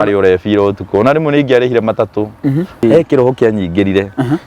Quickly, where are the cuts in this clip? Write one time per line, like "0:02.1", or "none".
0:02.8